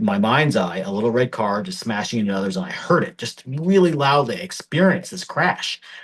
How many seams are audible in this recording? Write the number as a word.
zero